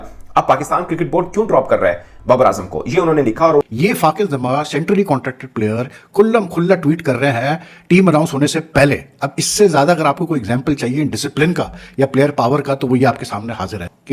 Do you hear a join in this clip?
yes; 1 cut; at 3.7 s

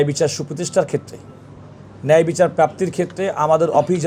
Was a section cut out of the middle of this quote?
no; 0 cuts

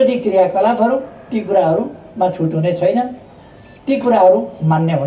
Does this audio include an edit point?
no; 0 cuts

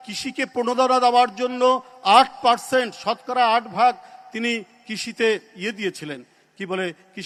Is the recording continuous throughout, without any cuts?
yes; 0 cuts

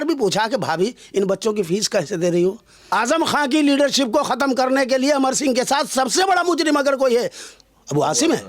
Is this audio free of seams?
no; 1 cut; at 2.7 s

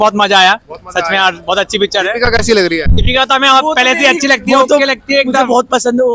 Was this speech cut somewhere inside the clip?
no; 0 cuts

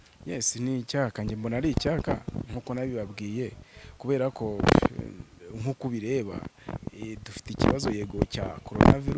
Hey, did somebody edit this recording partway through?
no; 0 cuts

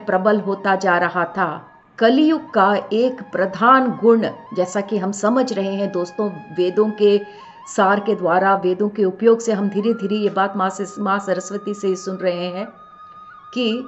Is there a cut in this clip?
no; 0 cuts

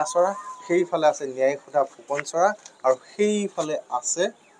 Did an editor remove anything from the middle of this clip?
no; 0 cuts

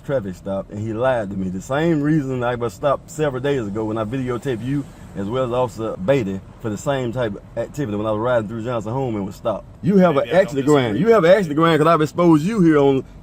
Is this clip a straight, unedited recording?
no; 2 cuts; at 5.9 s, 9.7 s

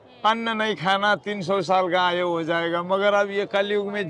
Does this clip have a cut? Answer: no; 0 cuts

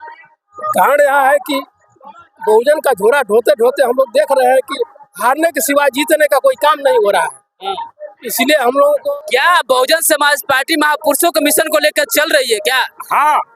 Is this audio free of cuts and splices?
no; 1 cut; at 9.0 s

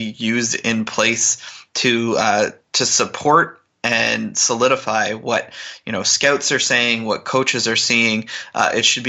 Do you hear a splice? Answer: no; 0 cuts

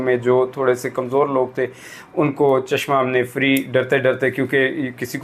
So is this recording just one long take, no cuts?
yes; 0 cuts

